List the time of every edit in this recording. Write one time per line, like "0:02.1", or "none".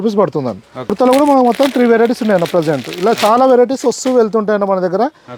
0:00.9

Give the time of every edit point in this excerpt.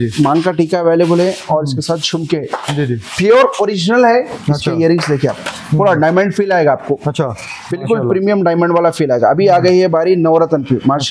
0:04.3

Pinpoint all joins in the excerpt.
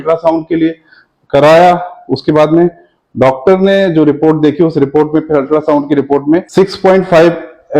0:06.5

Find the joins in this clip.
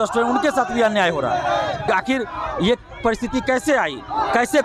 0:01.9

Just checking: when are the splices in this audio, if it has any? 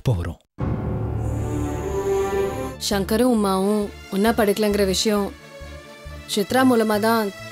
0:02.7

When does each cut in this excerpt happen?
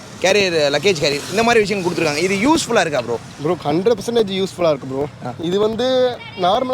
none

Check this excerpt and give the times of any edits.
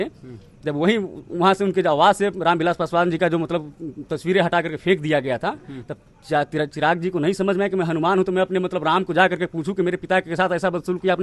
none

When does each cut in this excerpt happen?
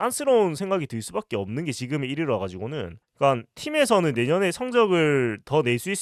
none

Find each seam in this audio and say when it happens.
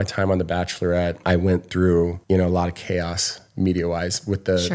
0:01.2
0:02.2

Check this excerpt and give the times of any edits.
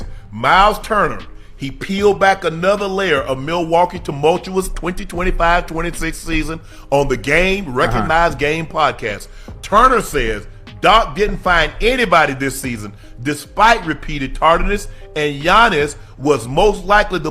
none

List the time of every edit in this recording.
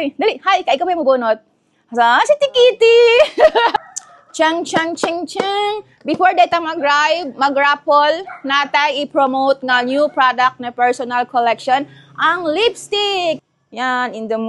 0:03.7
0:13.4

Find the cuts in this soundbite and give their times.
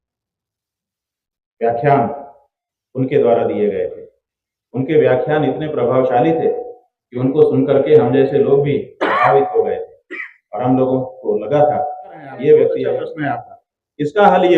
0:12.9

